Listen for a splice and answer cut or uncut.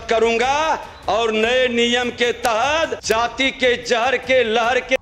cut